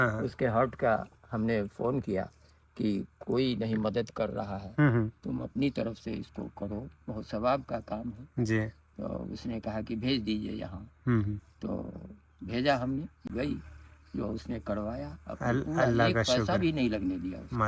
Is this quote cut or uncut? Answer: uncut